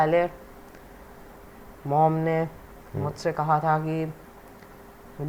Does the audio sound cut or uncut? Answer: uncut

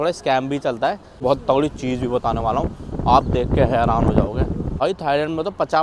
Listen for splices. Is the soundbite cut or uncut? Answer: cut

